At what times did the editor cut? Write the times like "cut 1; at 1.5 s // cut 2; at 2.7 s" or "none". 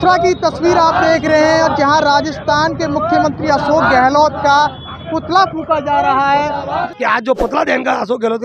cut 1; at 6.9 s